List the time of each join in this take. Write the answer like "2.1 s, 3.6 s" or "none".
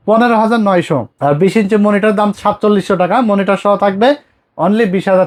none